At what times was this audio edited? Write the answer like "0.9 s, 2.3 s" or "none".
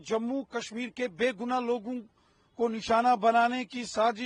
none